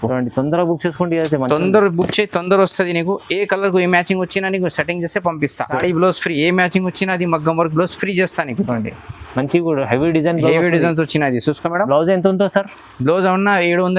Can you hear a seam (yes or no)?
yes